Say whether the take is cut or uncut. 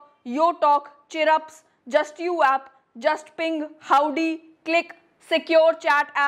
uncut